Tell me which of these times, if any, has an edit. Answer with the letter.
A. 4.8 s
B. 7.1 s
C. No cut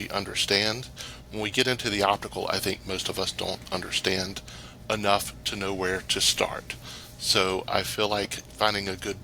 C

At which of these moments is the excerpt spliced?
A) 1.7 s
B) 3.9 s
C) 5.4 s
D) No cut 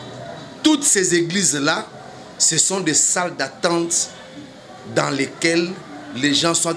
D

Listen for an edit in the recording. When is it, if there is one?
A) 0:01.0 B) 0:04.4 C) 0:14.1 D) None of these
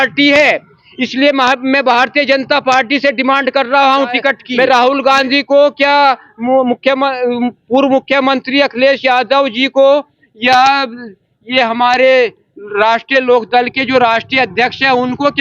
B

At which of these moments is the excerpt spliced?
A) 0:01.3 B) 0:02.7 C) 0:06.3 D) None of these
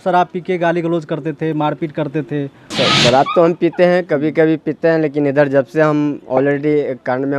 B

